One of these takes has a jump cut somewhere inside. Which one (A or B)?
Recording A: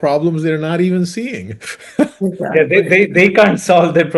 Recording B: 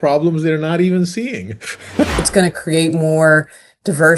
B